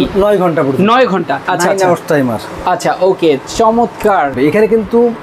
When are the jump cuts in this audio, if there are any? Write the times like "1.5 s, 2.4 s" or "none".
1.4 s, 4.3 s